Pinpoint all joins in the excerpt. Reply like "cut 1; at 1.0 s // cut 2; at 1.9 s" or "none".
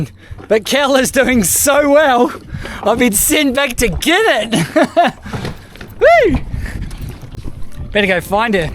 cut 1; at 7.4 s